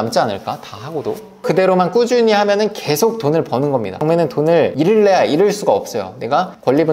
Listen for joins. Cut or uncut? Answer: uncut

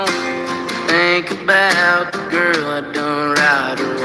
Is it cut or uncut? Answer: cut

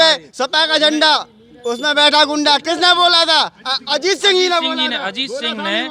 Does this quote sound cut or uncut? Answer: uncut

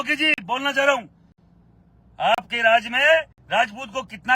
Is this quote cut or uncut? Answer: uncut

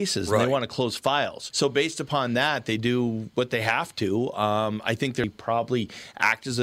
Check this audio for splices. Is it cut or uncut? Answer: cut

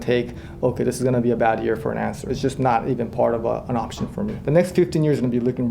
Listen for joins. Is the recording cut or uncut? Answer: cut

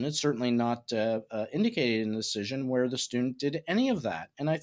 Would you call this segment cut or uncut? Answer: uncut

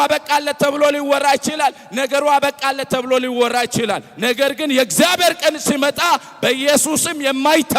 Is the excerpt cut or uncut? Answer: uncut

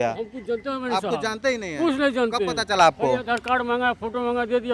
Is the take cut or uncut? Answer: uncut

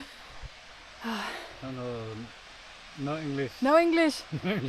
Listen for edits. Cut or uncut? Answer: uncut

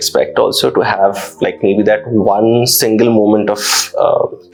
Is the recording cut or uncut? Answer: uncut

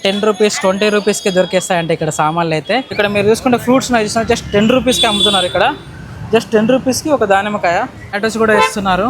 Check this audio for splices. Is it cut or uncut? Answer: cut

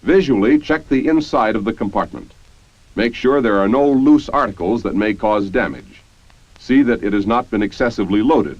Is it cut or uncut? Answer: cut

